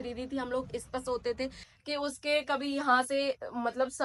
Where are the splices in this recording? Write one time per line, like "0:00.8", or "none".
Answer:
0:01.7